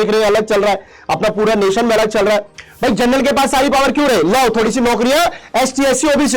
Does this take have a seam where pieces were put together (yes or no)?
yes